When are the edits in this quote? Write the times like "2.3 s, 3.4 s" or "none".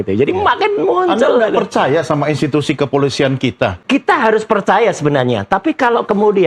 3.8 s